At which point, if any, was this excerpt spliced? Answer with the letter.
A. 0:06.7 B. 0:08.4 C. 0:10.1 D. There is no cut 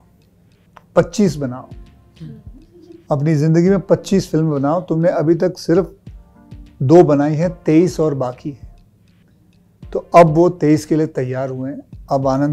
D